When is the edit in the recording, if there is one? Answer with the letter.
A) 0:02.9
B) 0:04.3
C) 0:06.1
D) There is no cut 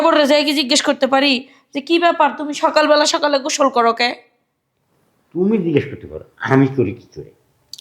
D